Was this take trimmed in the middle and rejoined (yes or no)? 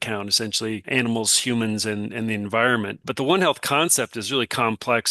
yes